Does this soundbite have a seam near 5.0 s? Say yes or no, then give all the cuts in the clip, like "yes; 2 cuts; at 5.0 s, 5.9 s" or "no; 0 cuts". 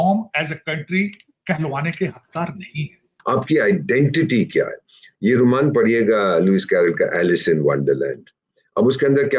no; 1 cut; at 3.1 s